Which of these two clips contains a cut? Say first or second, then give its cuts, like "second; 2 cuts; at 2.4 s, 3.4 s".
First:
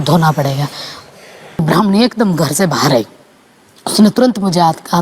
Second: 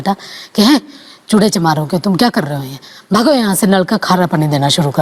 first; 1 cut; at 1.6 s